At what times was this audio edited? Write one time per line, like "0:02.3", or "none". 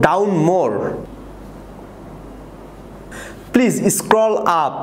0:01.1
0:03.1